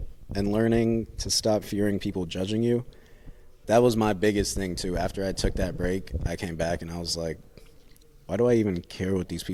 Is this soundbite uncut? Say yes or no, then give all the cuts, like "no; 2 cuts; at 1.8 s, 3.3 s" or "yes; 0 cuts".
yes; 0 cuts